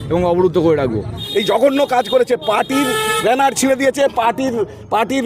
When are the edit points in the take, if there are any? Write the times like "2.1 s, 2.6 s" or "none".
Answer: 1.2 s